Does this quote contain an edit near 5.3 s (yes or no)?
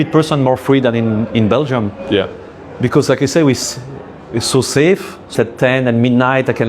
yes